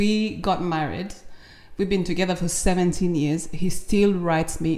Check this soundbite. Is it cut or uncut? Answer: uncut